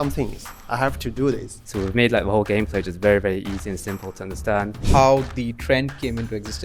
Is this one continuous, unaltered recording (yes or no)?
no